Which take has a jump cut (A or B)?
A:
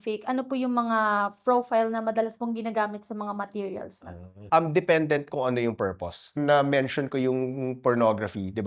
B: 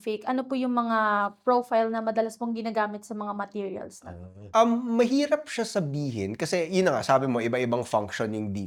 A